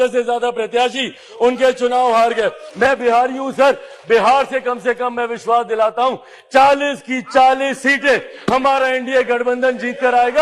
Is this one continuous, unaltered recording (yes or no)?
no